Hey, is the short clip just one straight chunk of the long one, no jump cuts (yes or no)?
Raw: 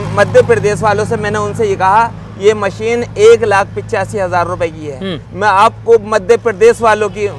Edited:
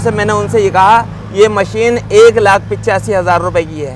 yes